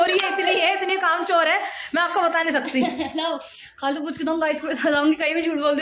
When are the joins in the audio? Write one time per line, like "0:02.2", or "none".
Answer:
none